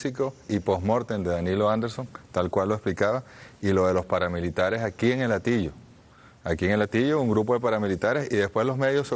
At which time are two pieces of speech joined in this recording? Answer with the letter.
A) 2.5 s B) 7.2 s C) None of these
A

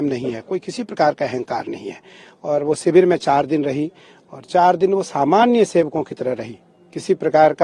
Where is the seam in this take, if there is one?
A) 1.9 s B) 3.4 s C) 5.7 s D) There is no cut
D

